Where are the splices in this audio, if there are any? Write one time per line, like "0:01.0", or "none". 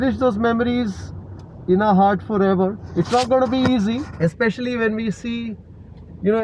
0:02.8